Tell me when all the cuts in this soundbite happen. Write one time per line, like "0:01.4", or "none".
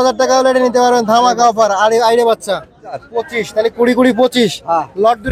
0:03.0